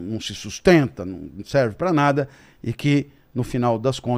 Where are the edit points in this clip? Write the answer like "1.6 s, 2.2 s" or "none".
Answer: none